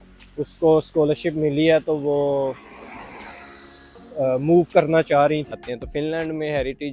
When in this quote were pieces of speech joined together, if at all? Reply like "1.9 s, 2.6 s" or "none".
5.6 s